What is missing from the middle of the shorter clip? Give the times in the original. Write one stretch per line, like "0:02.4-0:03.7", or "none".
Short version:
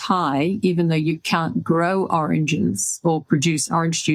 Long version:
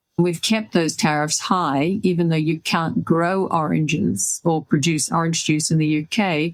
none